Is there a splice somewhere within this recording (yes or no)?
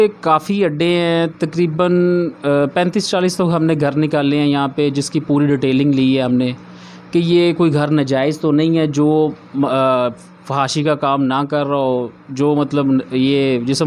no